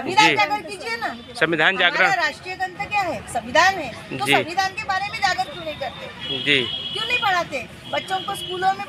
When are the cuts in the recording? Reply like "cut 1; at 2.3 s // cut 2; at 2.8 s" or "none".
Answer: none